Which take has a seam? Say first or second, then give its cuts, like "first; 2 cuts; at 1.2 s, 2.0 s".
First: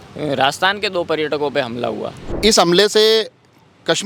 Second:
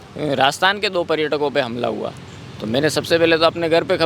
first; 1 cut; at 2.2 s